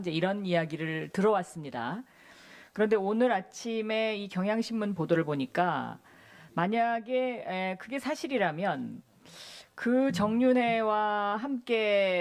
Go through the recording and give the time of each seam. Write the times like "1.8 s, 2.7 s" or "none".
1.7 s